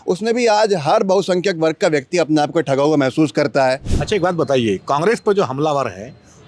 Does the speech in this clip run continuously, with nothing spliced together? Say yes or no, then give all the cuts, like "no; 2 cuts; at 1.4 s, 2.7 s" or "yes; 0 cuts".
no; 1 cut; at 3.9 s